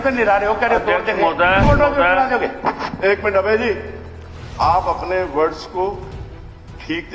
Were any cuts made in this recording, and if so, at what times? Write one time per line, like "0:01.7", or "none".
0:01.6